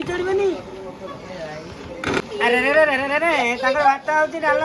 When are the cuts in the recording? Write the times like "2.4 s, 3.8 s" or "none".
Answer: 2.2 s